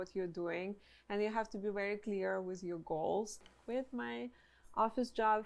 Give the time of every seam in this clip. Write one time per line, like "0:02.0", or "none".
0:03.5